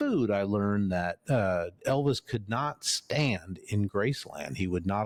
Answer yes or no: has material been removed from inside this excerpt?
no